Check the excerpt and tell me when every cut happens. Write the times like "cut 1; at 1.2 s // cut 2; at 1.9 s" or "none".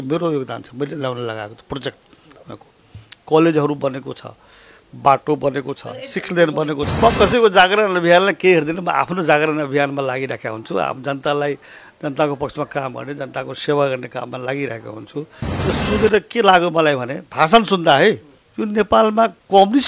cut 1; at 6.9 s // cut 2; at 15.4 s